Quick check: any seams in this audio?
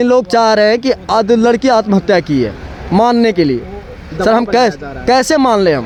no; 0 cuts

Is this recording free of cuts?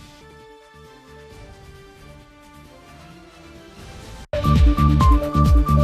yes; 0 cuts

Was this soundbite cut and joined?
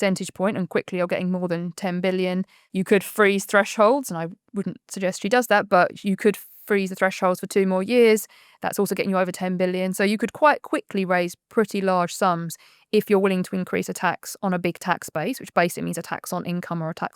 yes; 1 cut; at 2.6 s

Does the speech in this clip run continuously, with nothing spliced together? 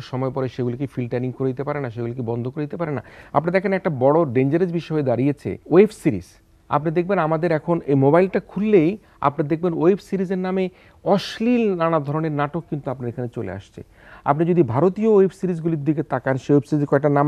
no; 2 cuts; at 3.2 s, 5.5 s

